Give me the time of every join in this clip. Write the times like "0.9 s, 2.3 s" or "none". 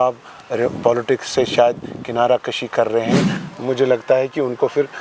3.4 s